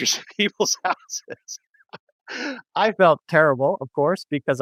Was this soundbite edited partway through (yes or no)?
no